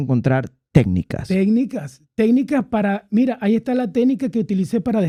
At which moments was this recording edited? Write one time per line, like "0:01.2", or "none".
none